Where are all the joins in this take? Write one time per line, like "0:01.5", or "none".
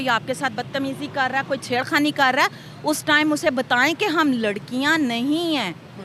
none